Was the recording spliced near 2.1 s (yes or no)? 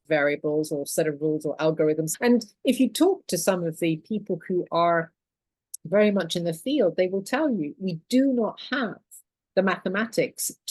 yes